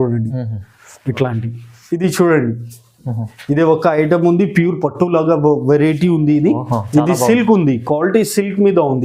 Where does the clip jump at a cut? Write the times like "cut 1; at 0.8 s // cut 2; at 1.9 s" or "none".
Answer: cut 1; at 1.8 s